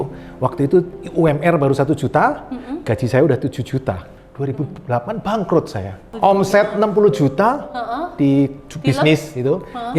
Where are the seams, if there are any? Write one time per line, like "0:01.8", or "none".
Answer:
0:04.1
0:06.1